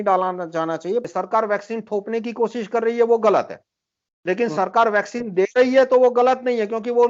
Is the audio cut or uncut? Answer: cut